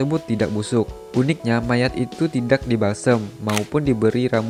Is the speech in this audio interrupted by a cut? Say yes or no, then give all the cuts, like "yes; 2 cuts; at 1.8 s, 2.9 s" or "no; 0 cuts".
no; 0 cuts